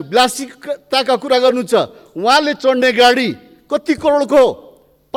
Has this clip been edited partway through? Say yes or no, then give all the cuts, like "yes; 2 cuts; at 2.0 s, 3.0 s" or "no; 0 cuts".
no; 0 cuts